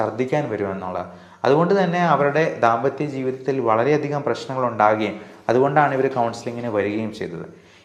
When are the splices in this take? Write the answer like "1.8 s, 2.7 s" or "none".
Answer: none